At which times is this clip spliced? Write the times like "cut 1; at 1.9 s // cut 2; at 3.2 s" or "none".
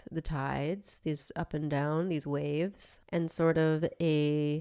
none